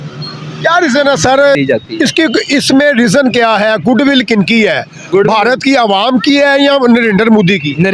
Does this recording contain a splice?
yes; 1 cut; at 1.6 s

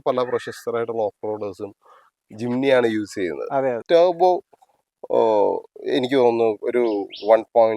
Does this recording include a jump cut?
yes; 1 cut; at 3.8 s

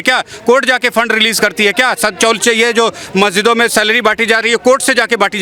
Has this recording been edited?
no; 0 cuts

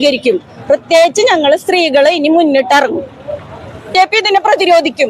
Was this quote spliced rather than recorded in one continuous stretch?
yes; 1 cut; at 3.9 s

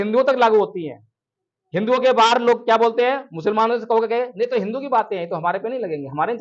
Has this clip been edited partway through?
no; 0 cuts

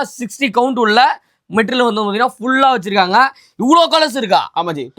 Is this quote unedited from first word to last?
yes; 0 cuts

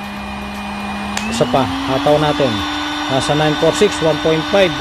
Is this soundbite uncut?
yes; 0 cuts

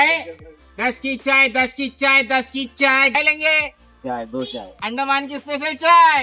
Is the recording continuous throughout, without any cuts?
no; 1 cut; at 4.7 s

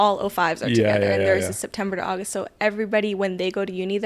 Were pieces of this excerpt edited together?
no; 0 cuts

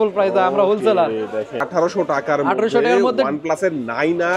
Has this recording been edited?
yes; 1 cut; at 1.6 s

